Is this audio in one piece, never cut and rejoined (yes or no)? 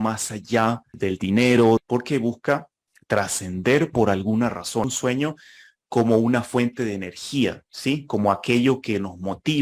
no